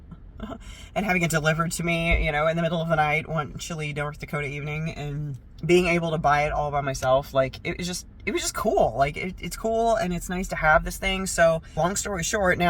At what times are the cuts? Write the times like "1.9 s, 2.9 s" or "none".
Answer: 11.7 s